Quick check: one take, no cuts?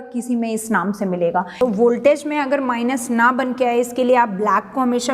no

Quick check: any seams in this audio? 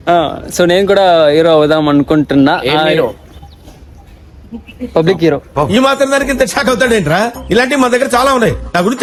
no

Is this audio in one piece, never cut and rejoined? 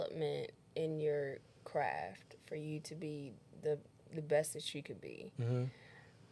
yes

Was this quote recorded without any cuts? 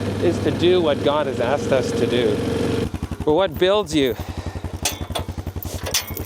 no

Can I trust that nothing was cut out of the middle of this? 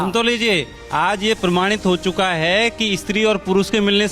yes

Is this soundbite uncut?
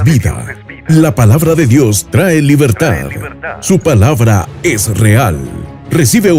yes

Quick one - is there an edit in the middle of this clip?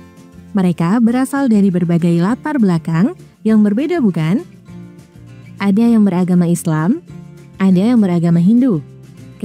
no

